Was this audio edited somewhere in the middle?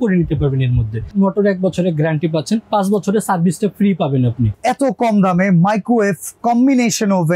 yes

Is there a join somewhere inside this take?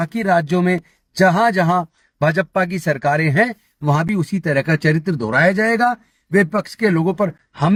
no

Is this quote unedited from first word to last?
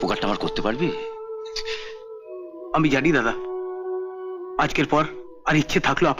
yes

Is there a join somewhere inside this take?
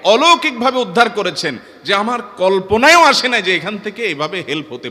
no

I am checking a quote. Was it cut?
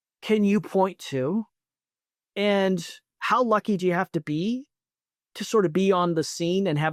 no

